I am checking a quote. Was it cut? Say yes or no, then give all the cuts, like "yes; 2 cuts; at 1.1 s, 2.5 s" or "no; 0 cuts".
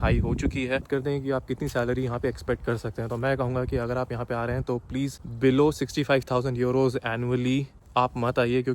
yes; 3 cuts; at 0.8 s, 5.2 s, 7.8 s